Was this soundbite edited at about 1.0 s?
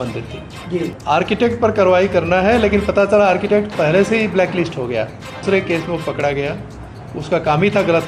yes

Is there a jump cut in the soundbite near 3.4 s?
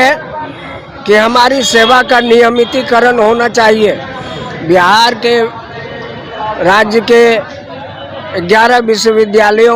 no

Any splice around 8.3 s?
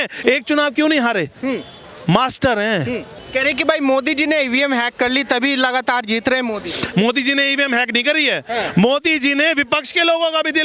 no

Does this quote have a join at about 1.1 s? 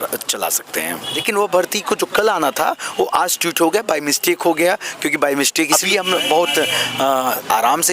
yes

